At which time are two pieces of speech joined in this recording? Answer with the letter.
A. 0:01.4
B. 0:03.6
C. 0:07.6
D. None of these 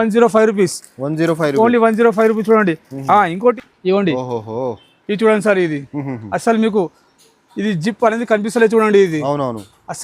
B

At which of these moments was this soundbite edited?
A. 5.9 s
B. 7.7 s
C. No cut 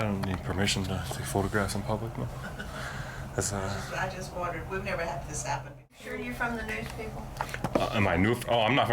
A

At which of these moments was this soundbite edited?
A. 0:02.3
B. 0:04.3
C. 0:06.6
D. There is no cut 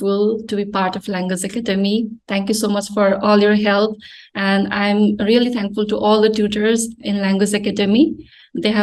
D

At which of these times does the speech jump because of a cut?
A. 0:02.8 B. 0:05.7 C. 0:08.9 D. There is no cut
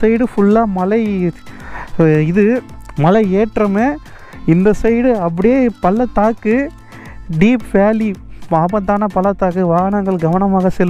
D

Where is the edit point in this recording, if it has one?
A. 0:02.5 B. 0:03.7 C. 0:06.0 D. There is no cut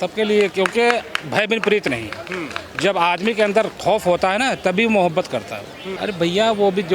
C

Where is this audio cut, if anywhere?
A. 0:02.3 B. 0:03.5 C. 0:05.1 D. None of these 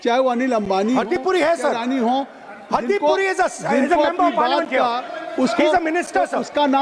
C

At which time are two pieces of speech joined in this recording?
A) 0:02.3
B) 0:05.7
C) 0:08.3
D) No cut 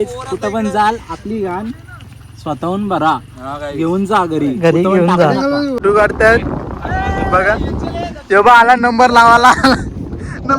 B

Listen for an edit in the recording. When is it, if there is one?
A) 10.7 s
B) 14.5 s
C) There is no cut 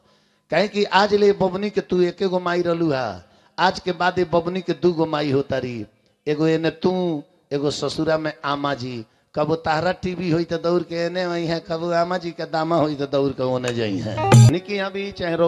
B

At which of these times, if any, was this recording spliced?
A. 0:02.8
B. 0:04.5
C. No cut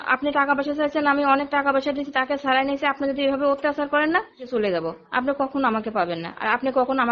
B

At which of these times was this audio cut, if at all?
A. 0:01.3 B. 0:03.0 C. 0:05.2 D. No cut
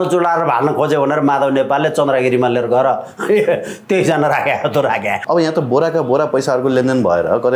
C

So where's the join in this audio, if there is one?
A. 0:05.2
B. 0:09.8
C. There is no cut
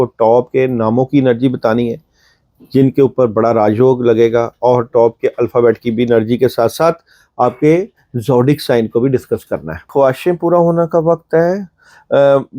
B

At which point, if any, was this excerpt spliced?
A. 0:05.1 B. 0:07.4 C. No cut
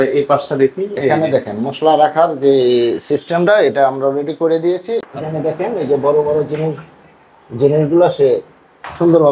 A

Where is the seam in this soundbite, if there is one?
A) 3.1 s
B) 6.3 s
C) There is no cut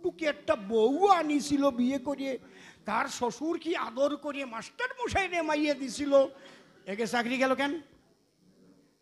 C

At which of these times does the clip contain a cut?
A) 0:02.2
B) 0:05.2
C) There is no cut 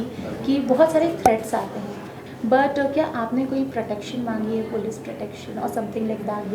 A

